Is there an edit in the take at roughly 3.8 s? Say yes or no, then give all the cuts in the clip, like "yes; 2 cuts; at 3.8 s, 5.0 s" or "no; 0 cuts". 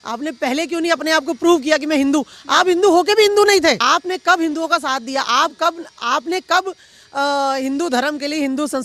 yes; 1 cut; at 3.8 s